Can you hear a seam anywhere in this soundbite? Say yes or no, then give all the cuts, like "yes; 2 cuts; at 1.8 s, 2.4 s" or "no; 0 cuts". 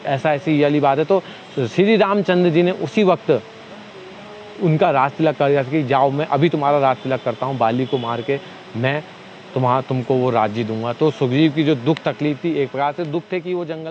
no; 0 cuts